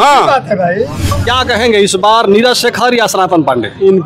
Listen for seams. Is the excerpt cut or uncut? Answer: cut